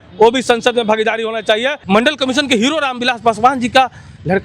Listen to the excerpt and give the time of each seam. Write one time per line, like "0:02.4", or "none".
0:01.8